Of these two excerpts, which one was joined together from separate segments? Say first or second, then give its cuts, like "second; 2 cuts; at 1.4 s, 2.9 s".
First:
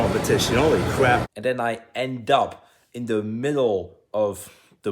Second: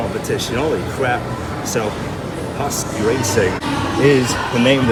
first; 1 cut; at 1.3 s